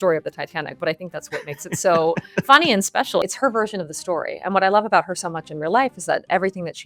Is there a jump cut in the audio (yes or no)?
yes